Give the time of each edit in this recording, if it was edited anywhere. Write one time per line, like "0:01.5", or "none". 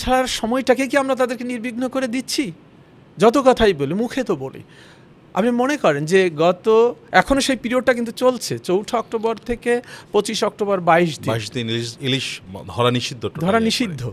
none